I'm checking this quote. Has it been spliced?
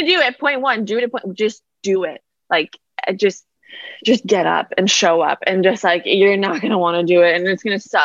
no; 0 cuts

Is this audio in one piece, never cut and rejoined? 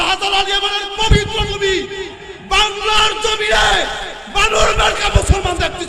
yes; 0 cuts

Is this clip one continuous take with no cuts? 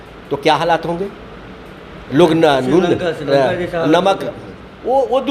yes; 0 cuts

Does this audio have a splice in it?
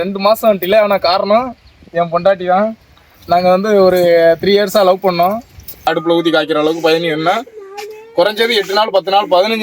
yes; 1 cut; at 5.8 s

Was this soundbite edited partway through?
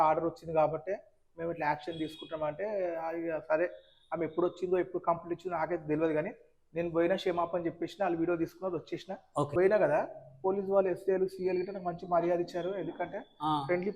yes; 1 cut; at 9.5 s

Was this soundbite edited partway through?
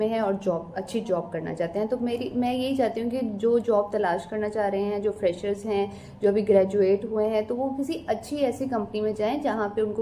no; 0 cuts

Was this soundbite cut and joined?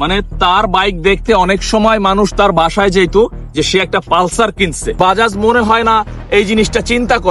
yes; 1 cut; at 5.0 s

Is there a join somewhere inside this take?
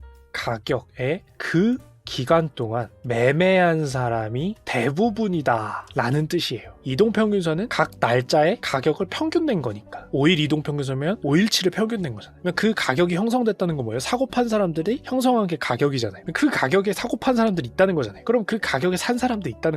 yes; 1 cut; at 6.7 s

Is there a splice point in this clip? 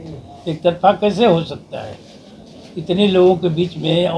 no; 0 cuts

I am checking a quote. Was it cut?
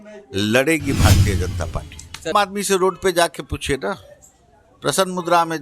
yes; 1 cut; at 2.3 s

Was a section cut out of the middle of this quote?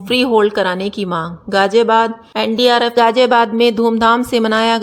yes; 1 cut; at 2.2 s

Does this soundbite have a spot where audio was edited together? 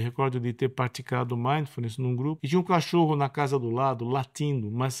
yes; 1 cut; at 2.4 s

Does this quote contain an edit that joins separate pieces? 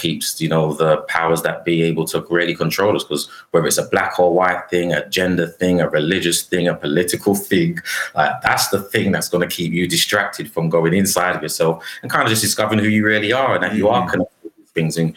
no; 0 cuts

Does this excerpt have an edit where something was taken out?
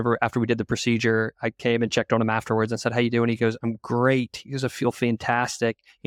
no; 0 cuts

